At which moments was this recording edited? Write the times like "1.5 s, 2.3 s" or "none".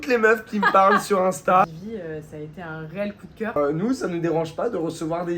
1.6 s, 3.6 s